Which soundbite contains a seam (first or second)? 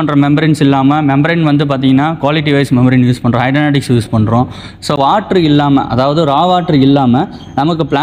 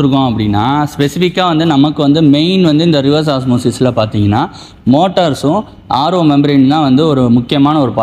first